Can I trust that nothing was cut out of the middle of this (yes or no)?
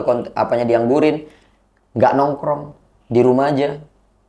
yes